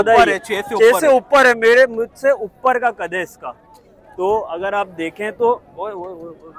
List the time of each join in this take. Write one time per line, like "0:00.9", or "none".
none